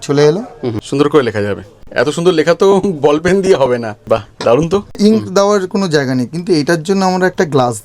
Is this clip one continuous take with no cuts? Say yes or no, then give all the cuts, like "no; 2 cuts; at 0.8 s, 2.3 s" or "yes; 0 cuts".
no; 4 cuts; at 0.8 s, 1.8 s, 3.9 s, 5.0 s